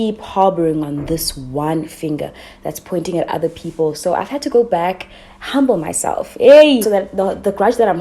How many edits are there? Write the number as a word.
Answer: one